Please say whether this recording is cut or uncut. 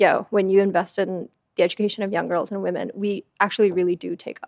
uncut